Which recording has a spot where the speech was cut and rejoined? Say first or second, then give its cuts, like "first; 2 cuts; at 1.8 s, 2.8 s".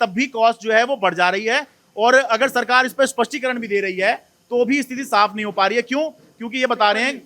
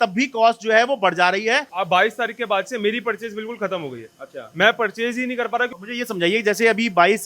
second; 2 cuts; at 1.7 s, 5.8 s